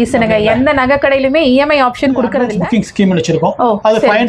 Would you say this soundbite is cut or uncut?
cut